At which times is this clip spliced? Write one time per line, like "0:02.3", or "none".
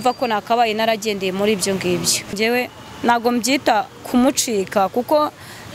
0:02.3